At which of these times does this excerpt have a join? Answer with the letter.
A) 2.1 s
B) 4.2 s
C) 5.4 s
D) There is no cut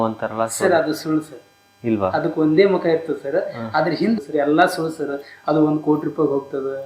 B